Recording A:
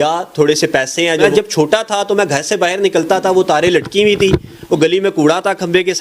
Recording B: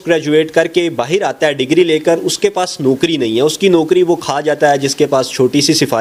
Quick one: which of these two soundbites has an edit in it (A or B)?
A